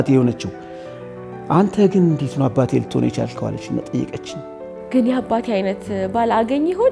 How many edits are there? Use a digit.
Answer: 1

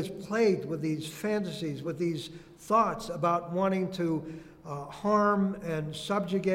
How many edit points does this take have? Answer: 1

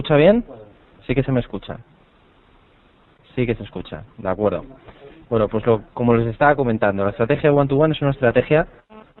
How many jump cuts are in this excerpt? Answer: 1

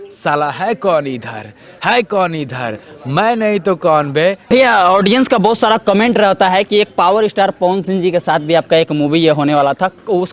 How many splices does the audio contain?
1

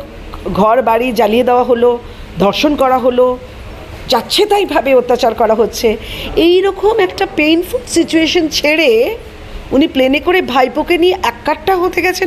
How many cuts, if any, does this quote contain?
0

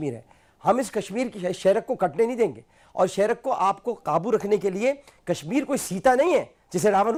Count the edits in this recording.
0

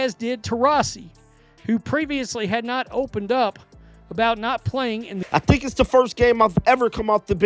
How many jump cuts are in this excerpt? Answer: 1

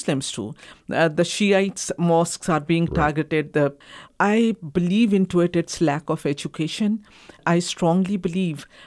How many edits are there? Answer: 2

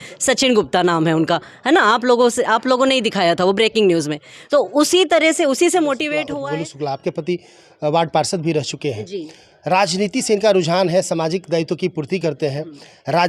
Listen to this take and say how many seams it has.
1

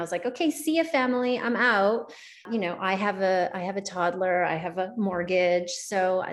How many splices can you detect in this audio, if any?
1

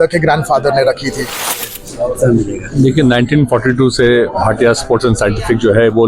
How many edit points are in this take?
1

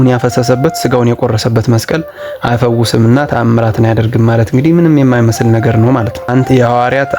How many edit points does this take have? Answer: 1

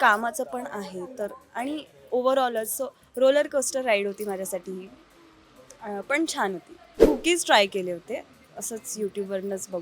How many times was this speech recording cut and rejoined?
1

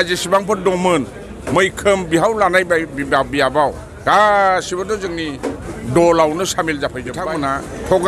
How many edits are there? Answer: 1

